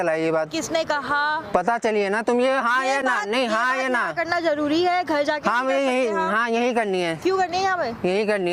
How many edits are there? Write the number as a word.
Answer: zero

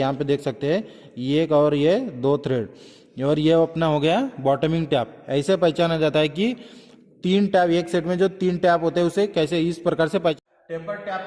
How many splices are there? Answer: one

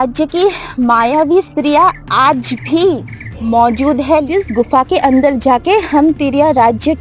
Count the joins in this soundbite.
one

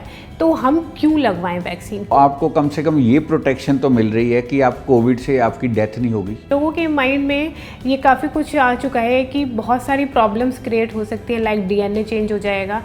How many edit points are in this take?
two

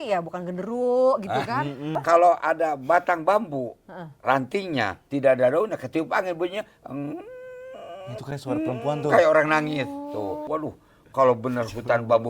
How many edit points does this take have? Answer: two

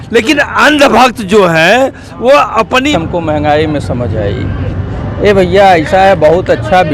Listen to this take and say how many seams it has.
one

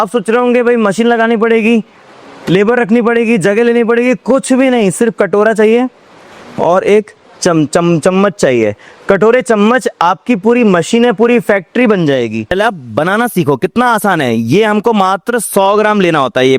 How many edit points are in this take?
one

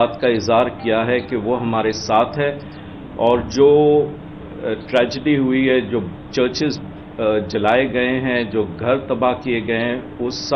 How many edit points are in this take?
zero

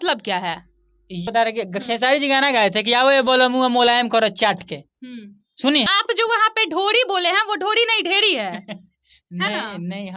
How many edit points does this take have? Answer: two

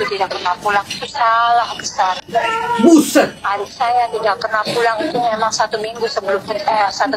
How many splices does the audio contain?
zero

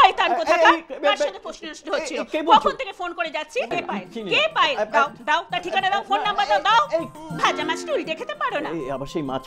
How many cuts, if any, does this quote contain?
two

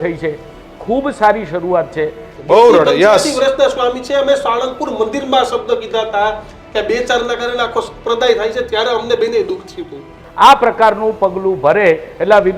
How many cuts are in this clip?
two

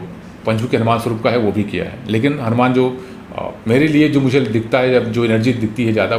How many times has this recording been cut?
zero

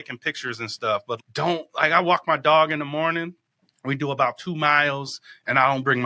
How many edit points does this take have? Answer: one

